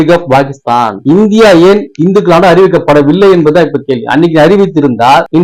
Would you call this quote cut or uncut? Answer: cut